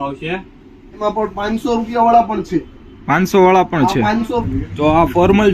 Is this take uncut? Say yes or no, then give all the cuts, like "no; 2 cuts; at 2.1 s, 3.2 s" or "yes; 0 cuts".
no; 2 cuts; at 1.0 s, 4.5 s